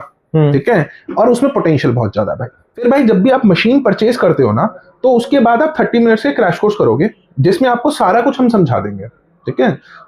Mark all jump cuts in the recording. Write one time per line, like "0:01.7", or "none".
0:02.8